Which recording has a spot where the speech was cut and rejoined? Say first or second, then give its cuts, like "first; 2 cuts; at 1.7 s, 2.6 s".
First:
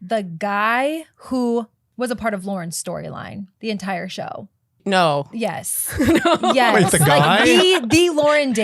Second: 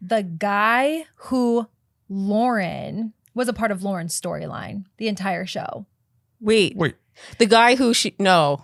first; 2 cuts; at 1.8 s, 4.8 s